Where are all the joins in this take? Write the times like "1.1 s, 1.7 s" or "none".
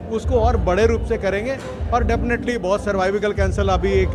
none